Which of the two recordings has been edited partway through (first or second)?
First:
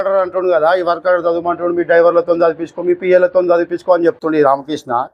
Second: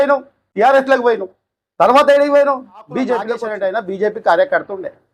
second